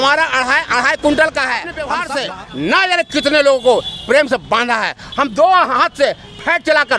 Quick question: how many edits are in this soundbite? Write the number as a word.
one